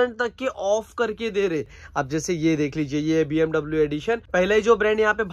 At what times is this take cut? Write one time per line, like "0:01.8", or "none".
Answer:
0:01.8
0:04.2